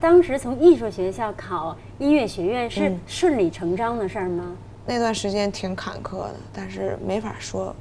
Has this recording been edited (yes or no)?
no